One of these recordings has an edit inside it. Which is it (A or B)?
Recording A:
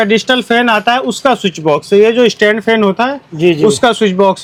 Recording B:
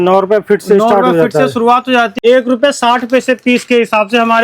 B